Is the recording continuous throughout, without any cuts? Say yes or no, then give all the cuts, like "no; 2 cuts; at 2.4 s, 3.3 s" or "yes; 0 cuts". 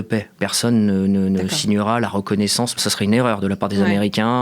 no; 1 cut; at 2.8 s